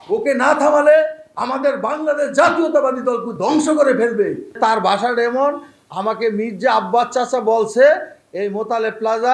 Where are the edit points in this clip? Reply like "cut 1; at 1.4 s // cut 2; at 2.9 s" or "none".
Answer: cut 1; at 4.6 s